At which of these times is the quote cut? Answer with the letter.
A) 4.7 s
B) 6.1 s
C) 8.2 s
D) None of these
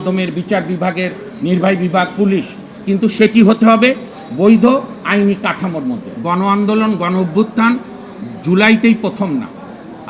B